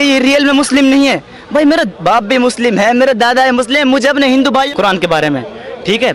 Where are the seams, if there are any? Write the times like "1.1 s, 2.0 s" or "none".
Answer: 4.7 s

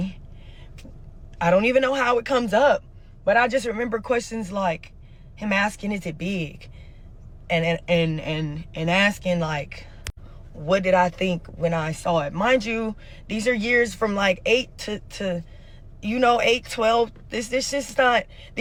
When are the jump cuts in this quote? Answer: none

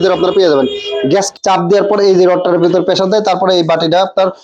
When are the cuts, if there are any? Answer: 1.3 s

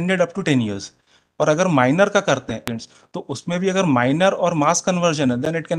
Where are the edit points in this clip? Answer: 2.7 s

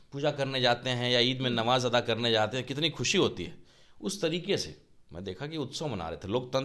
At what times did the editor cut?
none

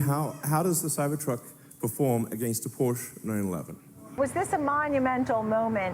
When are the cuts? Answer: 4.1 s

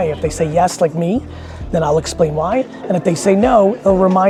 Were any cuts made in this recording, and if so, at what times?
none

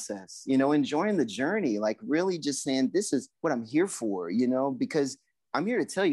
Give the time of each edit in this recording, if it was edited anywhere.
3.3 s

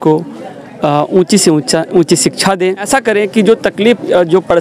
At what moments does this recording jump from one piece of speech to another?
2.8 s

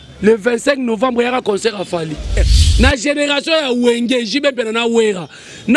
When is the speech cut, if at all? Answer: 2.5 s

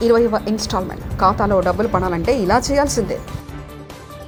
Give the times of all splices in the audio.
none

